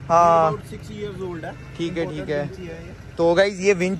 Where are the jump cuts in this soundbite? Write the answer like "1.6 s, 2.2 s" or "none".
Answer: none